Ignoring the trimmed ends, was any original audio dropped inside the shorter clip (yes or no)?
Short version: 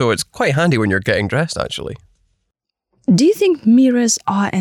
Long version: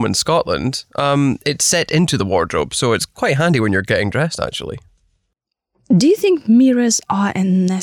no